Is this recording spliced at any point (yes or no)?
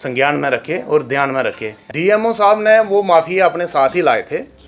yes